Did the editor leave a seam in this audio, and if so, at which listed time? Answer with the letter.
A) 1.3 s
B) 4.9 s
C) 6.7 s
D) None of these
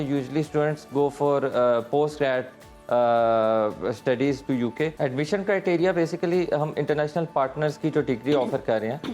B